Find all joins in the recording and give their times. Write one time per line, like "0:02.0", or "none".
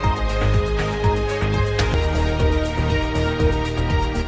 none